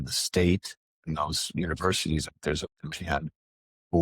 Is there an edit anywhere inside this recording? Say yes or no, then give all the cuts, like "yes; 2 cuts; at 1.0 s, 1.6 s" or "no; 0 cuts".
yes; 1 cut; at 2.2 s